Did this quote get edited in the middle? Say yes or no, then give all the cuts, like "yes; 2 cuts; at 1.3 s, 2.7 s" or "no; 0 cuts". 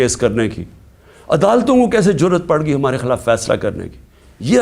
no; 0 cuts